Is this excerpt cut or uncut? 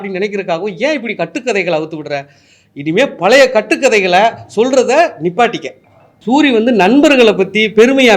cut